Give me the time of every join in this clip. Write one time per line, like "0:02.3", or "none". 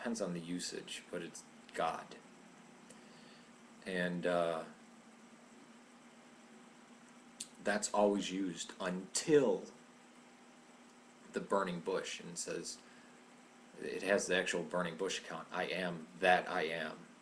0:11.5